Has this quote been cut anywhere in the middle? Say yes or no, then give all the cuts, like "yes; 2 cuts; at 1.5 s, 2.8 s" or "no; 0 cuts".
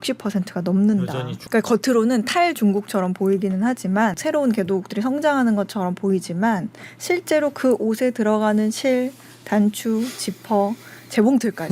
yes; 2 cuts; at 1.4 s, 4.2 s